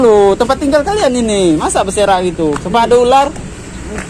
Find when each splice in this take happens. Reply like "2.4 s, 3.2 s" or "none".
none